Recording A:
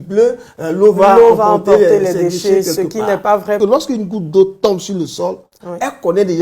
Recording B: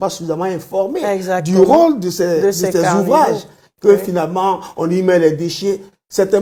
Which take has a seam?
A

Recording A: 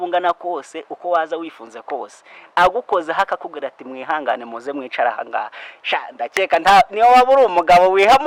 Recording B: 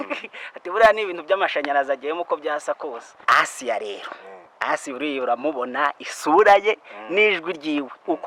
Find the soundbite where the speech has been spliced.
B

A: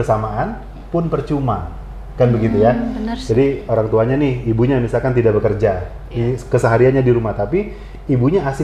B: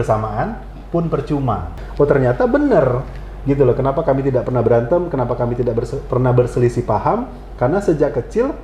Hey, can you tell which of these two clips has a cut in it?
B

